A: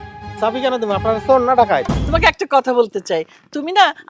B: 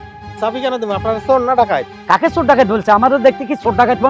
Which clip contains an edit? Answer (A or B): A